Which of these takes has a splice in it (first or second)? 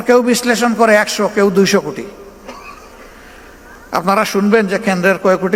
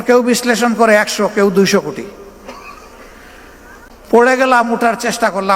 second